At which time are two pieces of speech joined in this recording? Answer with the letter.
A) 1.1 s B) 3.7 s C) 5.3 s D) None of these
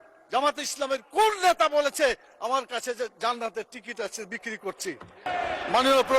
C